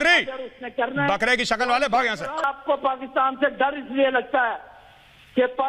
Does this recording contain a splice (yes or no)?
no